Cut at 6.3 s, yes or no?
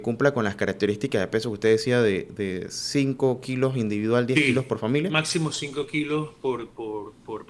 no